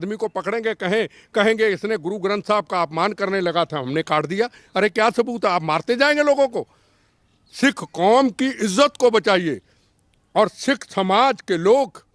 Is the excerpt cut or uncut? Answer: uncut